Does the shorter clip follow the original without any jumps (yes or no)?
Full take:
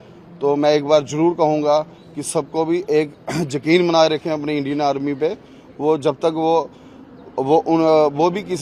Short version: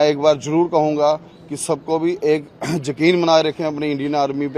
yes